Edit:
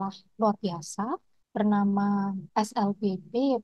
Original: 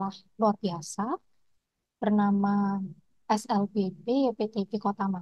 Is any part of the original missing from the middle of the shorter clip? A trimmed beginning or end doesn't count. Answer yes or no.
yes